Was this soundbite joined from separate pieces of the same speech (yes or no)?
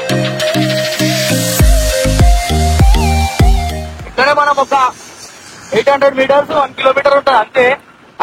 no